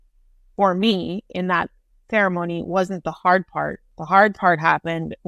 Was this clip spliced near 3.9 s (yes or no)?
yes